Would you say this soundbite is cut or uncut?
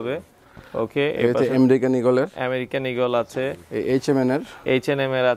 uncut